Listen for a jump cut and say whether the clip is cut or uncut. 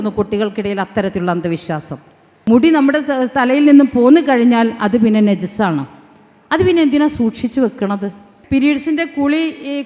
cut